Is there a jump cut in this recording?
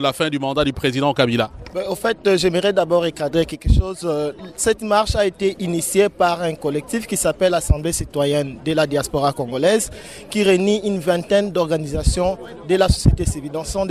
yes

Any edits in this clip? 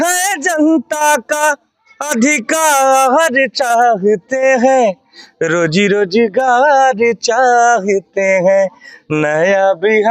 no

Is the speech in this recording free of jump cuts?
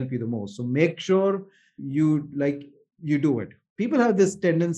no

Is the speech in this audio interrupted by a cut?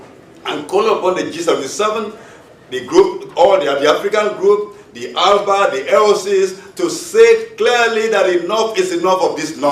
yes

